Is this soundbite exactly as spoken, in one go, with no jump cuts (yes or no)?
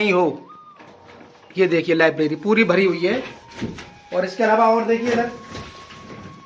yes